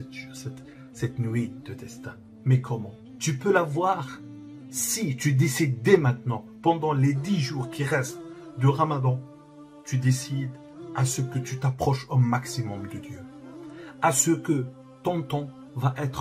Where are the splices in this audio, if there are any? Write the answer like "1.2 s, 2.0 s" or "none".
3.1 s